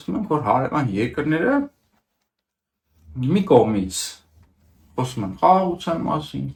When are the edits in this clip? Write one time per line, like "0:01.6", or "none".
none